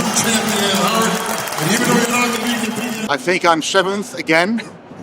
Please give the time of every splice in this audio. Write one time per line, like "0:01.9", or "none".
0:02.9